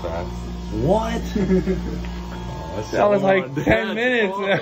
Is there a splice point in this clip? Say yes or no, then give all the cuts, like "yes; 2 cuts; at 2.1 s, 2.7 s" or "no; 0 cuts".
no; 0 cuts